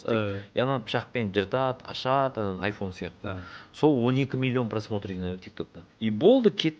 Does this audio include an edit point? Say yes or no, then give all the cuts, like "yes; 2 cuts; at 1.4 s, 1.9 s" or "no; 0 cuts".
yes; 1 cut; at 5.8 s